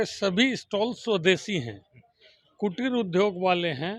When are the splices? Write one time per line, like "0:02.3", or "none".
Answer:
none